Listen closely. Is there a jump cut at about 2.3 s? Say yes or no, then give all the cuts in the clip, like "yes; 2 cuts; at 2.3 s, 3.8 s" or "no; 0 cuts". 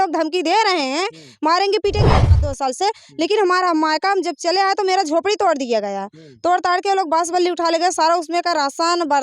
yes; 1 cut; at 2.3 s